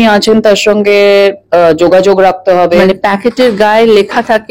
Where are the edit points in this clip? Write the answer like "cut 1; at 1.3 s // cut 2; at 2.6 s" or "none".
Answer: cut 1; at 2.8 s